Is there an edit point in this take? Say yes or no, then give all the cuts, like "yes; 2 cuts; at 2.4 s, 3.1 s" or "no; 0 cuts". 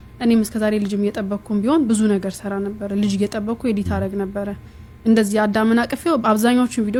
no; 0 cuts